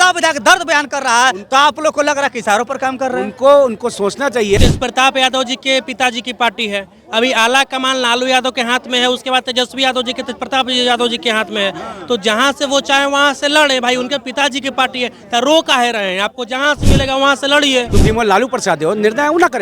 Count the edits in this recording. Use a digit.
2